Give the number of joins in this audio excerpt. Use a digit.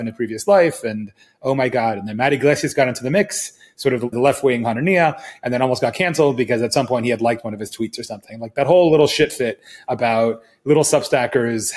1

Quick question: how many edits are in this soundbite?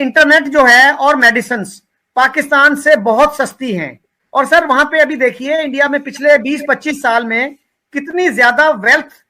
1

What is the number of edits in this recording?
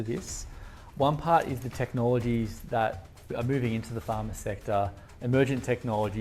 1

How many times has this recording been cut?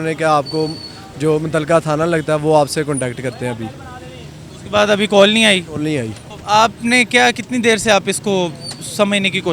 0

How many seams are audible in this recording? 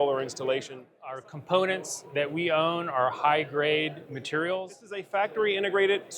2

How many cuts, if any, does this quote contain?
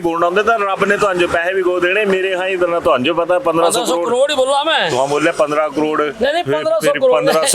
0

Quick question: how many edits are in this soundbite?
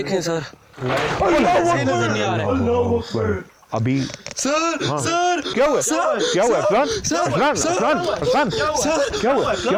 0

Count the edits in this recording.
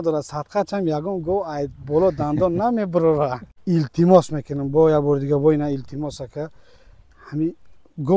1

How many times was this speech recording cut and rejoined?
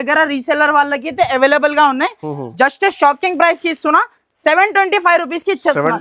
0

